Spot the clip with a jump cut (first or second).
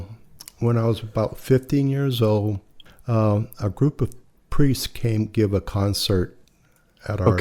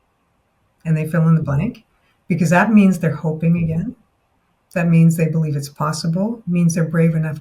first